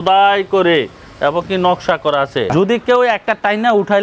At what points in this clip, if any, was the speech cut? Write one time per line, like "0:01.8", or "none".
0:02.5